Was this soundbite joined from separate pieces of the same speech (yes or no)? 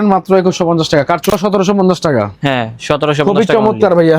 yes